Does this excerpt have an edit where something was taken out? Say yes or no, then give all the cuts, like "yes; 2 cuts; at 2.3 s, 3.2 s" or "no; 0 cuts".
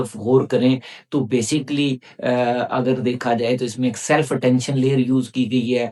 no; 0 cuts